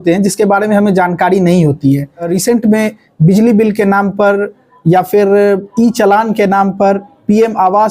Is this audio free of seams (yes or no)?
no